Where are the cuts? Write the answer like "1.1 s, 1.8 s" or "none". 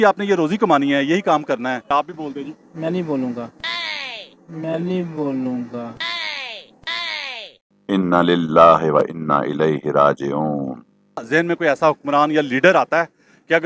1.9 s, 6.0 s, 11.2 s